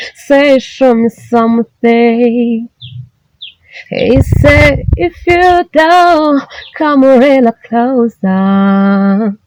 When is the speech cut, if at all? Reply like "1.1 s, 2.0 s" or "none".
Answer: none